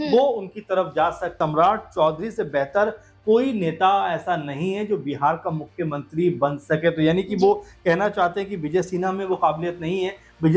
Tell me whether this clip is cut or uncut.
cut